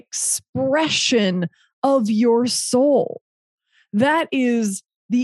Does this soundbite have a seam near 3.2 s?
no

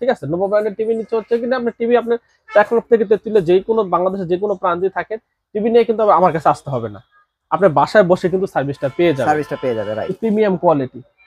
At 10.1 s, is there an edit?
yes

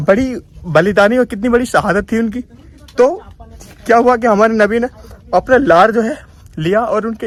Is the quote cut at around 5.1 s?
no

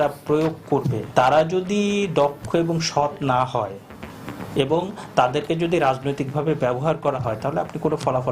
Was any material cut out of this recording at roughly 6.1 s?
no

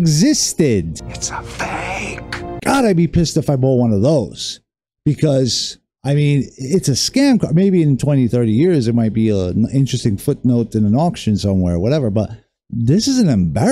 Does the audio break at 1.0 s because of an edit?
no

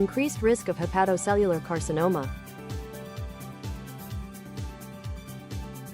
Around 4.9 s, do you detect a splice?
no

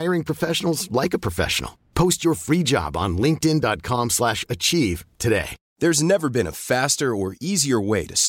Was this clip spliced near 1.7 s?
no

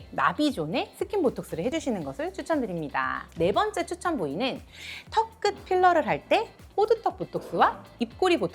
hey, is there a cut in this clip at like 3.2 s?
yes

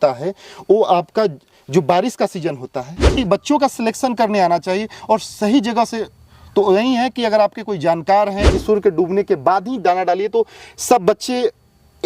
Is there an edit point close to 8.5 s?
yes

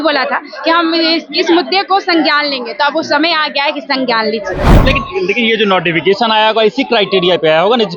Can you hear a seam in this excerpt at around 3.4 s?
no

